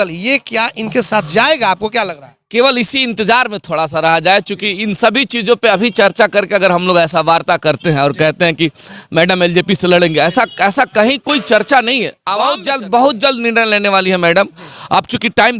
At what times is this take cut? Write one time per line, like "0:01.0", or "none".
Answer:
0:12.2